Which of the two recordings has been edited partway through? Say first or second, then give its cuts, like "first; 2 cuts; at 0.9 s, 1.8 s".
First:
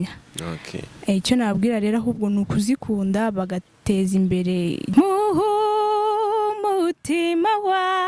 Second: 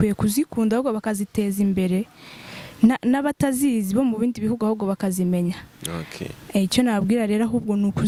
first; 1 cut; at 4.9 s